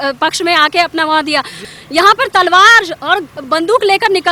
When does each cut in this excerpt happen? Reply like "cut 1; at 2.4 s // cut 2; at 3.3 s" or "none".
cut 1; at 1.6 s

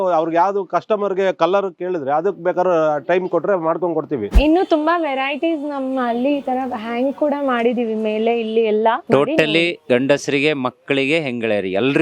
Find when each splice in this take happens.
cut 1; at 4.3 s // cut 2; at 9.0 s

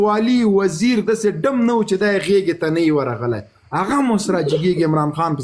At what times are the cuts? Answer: none

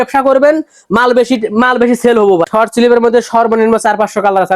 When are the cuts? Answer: cut 1; at 2.5 s

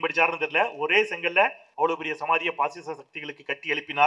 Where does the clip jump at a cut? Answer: cut 1; at 1.6 s

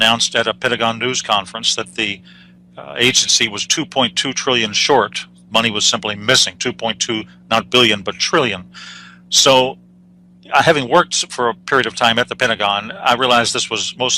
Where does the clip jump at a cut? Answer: cut 1; at 10.5 s

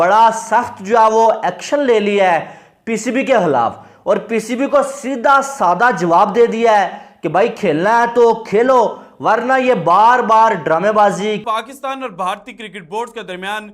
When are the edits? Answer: cut 1; at 11.4 s

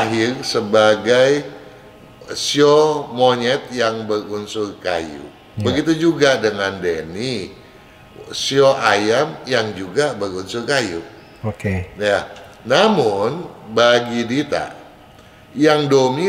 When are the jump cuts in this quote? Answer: none

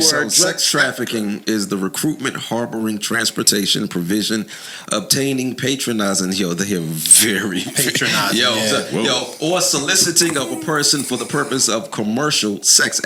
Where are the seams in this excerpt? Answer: none

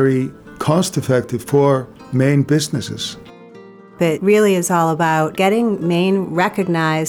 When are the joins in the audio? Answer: cut 1; at 2.0 s // cut 2; at 3.8 s // cut 3; at 5.3 s

